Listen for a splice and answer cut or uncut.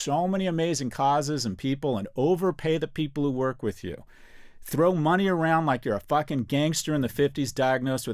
uncut